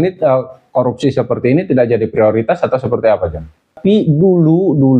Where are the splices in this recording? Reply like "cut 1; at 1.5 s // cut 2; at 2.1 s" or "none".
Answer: cut 1; at 3.7 s